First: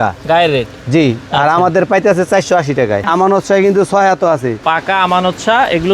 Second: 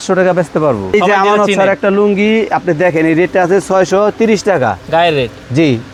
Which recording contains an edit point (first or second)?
first